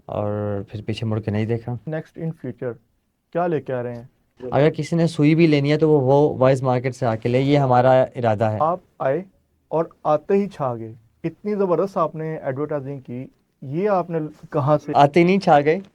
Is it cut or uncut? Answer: cut